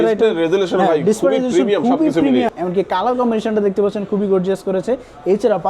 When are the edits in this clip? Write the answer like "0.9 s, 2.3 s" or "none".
2.5 s

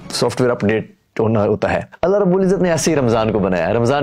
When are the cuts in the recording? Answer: 1.9 s

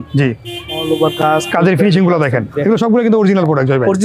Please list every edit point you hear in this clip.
none

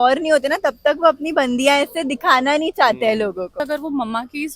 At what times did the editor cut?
3.6 s

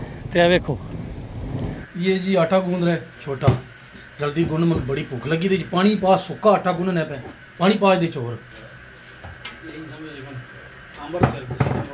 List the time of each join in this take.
1.8 s

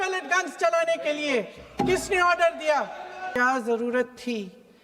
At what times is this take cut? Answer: 3.3 s

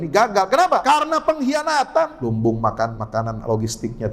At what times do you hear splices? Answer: 0.8 s, 2.2 s, 3.0 s

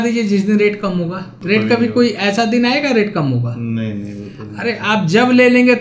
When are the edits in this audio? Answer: 1.3 s

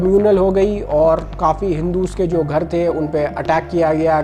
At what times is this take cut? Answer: none

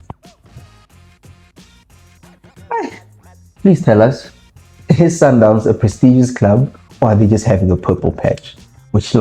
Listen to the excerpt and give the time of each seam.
none

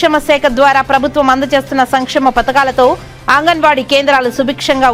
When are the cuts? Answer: none

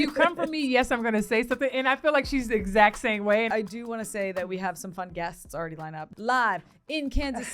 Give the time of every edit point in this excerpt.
3.5 s, 6.1 s

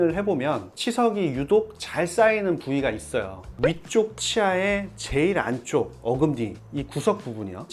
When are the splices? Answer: none

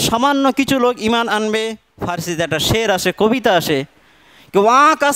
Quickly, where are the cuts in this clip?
1.9 s

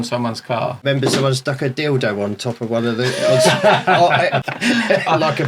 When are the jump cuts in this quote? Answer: 0.8 s, 4.4 s

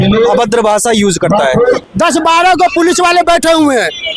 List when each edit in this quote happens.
1.8 s

